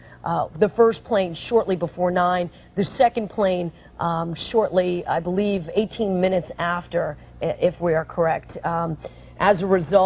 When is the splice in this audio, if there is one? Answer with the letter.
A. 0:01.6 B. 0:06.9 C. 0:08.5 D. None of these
D